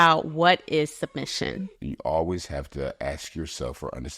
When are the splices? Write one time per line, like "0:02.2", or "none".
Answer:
0:01.7